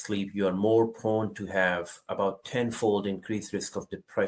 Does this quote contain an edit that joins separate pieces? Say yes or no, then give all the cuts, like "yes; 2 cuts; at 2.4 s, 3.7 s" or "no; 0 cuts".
no; 0 cuts